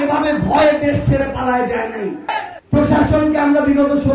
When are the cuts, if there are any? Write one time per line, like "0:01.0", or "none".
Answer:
0:02.3